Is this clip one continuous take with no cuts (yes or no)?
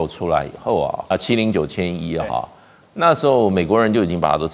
no